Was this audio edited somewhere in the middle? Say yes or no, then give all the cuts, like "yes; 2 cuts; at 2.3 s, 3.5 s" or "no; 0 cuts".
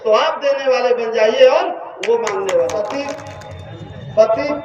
yes; 1 cut; at 3.1 s